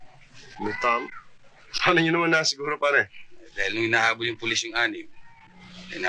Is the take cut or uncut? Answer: uncut